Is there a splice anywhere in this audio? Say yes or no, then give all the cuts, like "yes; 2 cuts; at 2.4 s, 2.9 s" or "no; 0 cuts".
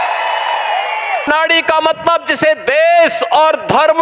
yes; 1 cut; at 1.3 s